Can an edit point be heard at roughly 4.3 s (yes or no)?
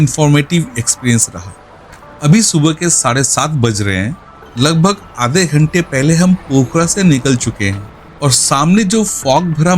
no